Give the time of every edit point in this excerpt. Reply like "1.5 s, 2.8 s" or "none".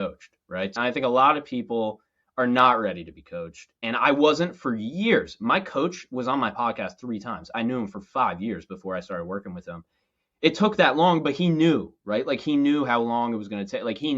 0.8 s, 7.5 s